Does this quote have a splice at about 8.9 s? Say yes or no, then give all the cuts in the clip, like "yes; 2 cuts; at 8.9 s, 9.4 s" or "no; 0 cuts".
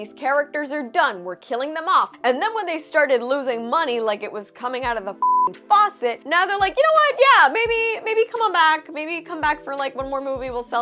no; 2 cuts; at 2.1 s, 6.2 s